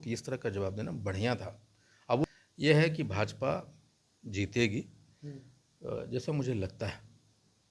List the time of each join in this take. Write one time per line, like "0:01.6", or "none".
0:02.2